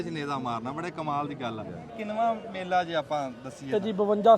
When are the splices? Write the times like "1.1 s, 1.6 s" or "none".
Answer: 1.9 s